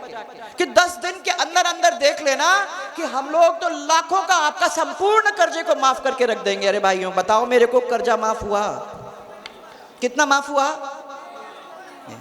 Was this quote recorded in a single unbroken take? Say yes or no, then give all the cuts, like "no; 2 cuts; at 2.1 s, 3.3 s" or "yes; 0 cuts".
yes; 0 cuts